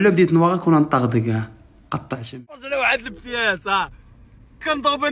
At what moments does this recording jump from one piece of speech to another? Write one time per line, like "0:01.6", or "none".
0:02.4

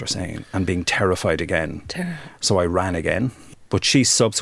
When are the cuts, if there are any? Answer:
0:03.4

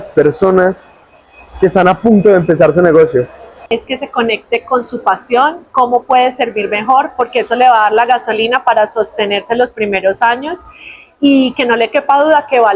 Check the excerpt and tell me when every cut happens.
0:03.6

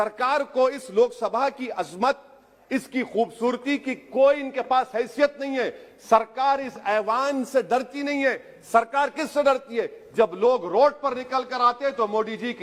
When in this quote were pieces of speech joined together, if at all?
none

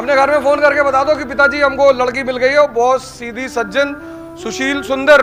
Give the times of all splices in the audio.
none

